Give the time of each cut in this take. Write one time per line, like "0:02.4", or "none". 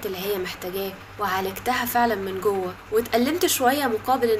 0:01.0
0:02.8